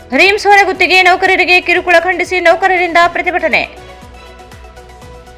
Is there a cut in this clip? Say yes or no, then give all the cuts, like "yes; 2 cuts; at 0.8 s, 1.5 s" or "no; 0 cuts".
no; 0 cuts